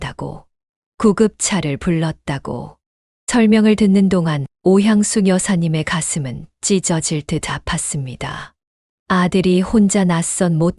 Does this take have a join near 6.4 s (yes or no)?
no